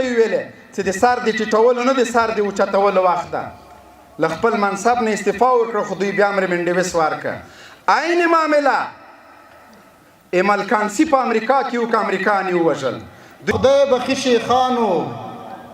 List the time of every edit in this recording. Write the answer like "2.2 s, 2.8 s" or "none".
13.5 s